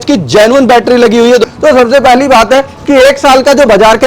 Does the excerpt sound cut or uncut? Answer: cut